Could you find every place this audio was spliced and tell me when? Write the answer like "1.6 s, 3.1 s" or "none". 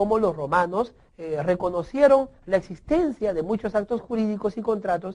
none